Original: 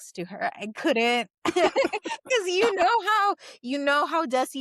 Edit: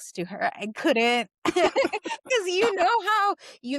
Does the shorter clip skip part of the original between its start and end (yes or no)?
no